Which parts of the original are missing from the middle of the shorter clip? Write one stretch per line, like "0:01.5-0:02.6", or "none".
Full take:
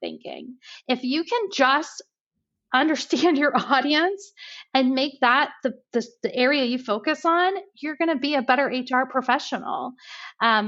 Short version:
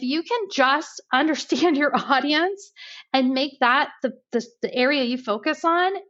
0:02.0-0:02.6